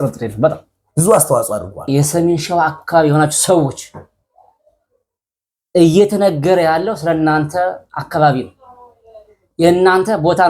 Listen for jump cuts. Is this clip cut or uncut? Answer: cut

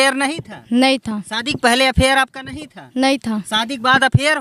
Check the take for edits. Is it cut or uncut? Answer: uncut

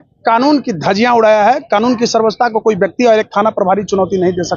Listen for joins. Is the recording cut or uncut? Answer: uncut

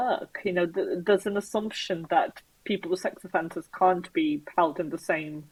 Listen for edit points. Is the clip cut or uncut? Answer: uncut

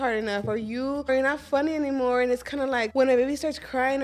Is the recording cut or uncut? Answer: cut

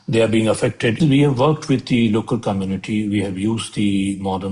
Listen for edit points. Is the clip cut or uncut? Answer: cut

